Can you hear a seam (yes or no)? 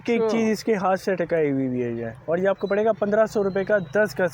no